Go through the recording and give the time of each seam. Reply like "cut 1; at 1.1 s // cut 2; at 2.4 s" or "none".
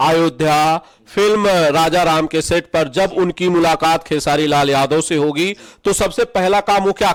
none

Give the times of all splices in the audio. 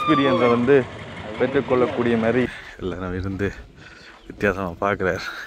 cut 1; at 2.5 s

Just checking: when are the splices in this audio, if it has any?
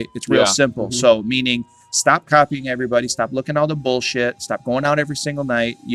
none

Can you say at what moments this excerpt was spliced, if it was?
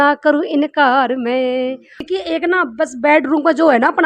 cut 1; at 2.0 s

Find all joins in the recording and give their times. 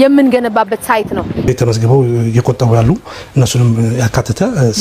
cut 1; at 1.5 s

